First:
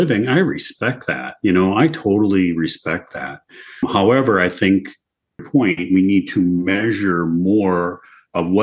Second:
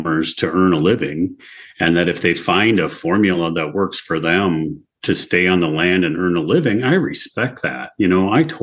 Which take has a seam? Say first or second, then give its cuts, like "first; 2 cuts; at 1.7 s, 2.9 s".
first; 2 cuts; at 3.8 s, 5.3 s